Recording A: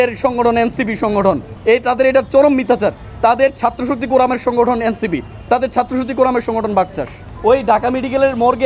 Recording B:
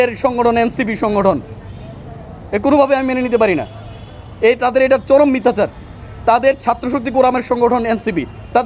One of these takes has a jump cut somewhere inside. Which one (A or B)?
A